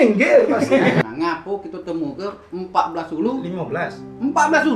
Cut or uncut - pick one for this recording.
cut